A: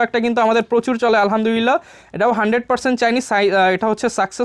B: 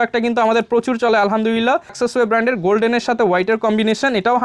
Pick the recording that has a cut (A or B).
B